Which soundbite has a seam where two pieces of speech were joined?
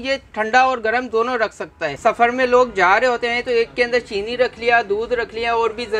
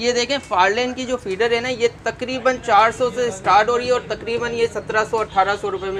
first; 1 cut; at 1.9 s

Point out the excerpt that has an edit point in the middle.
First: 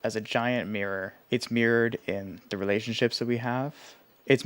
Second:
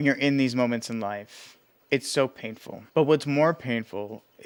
first; 1 cut; at 1.2 s

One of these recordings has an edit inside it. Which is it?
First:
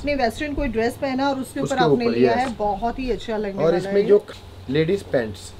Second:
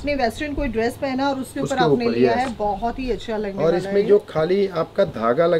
first; 1 cut; at 4.3 s

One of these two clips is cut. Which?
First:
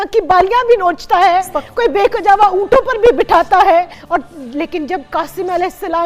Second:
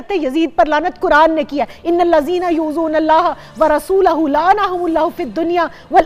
first; 1 cut; at 4.0 s

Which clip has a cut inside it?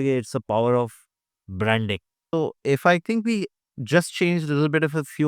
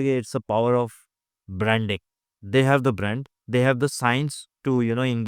first; 1 cut; at 2.3 s

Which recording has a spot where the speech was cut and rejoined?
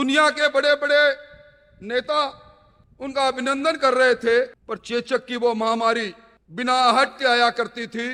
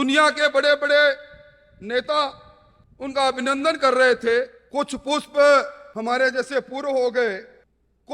second; 1 cut; at 4.6 s

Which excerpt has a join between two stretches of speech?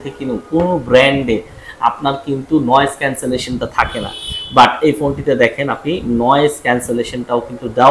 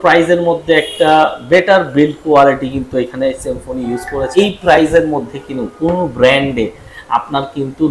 second; 1 cut; at 4.3 s

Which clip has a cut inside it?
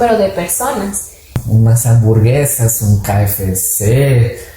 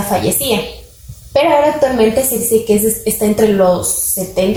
first; 1 cut; at 1.4 s

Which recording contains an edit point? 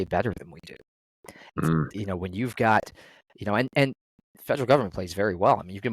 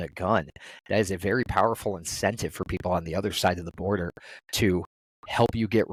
first; 1 cut; at 1.5 s

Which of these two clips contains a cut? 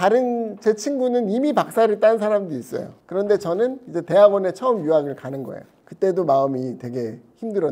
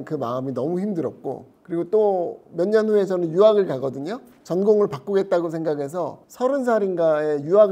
second; 1 cut; at 6.2 s

